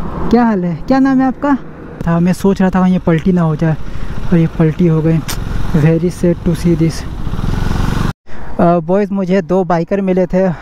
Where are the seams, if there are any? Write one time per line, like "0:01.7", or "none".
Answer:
0:02.0
0:08.2

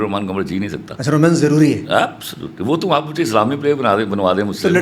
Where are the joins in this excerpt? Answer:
none

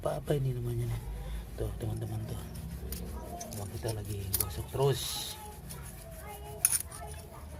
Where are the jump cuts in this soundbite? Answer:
none

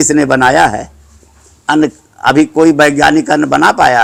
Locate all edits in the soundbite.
none

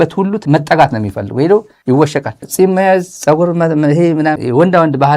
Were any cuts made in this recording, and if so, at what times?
0:02.4
0:04.4

